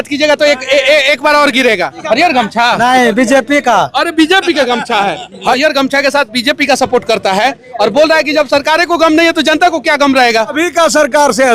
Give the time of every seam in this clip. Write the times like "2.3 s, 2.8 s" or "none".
2.0 s, 5.6 s, 10.5 s